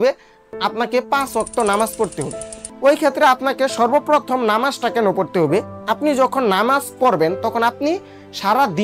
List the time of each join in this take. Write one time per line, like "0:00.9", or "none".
0:02.6